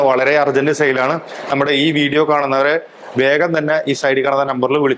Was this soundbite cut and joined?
no; 0 cuts

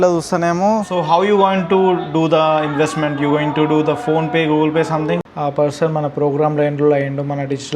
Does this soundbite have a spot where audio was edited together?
yes; 2 cuts; at 0.9 s, 5.2 s

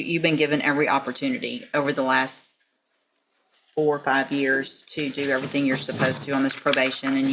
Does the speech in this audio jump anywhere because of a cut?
no; 0 cuts

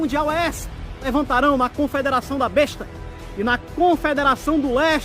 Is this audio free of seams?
no; 1 cut; at 1.0 s

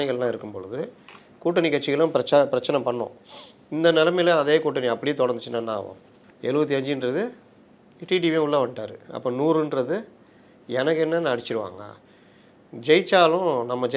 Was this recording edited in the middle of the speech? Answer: no; 0 cuts

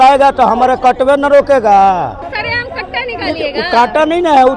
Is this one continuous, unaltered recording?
no; 1 cut; at 2.2 s

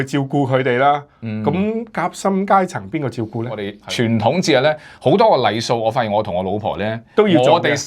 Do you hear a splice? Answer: yes; 1 cut; at 3.7 s

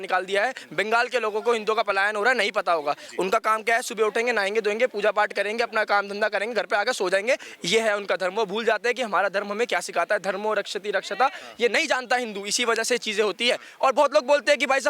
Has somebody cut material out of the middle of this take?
no; 0 cuts

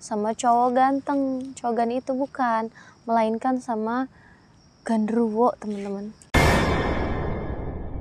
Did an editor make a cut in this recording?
no; 0 cuts

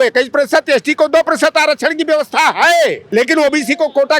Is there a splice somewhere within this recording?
yes; 1 cut; at 3.0 s

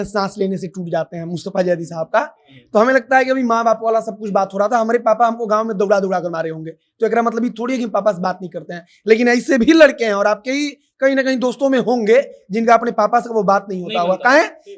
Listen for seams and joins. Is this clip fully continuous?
yes; 0 cuts

